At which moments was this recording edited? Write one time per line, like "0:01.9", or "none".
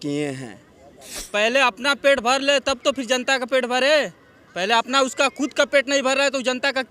0:01.2